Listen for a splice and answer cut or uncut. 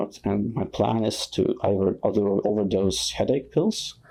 uncut